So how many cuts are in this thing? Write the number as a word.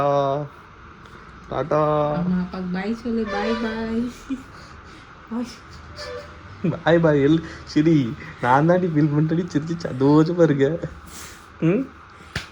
zero